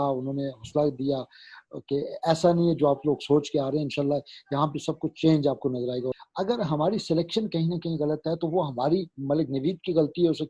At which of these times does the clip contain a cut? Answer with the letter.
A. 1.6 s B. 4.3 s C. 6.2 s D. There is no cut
C